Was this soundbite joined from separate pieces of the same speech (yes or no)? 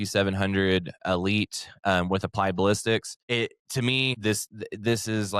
yes